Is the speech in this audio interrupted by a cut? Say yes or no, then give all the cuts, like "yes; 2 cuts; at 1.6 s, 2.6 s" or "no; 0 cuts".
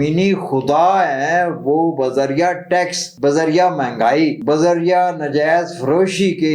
yes; 2 cuts; at 3.0 s, 4.4 s